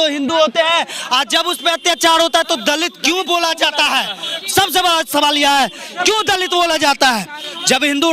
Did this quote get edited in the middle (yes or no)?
no